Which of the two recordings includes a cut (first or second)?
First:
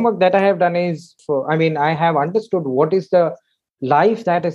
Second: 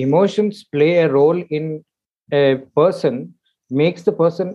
first